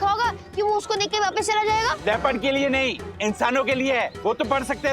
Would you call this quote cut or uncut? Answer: cut